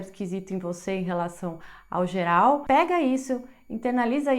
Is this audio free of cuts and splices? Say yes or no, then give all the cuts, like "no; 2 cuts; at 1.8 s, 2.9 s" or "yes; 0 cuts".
no; 1 cut; at 2.6 s